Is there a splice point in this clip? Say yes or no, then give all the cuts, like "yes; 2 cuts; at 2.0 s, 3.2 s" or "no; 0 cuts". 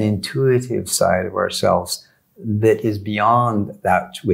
no; 0 cuts